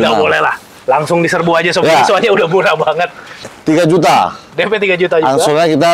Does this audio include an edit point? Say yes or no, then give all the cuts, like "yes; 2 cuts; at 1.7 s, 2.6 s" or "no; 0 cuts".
yes; 1 cut; at 3.5 s